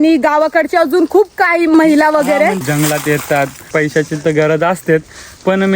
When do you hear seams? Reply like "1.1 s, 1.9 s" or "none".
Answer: 1.7 s, 2.6 s, 3.7 s